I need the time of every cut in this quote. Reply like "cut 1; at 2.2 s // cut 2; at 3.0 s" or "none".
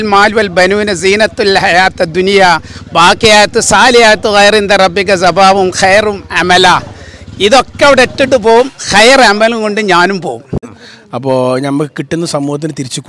cut 1; at 10.6 s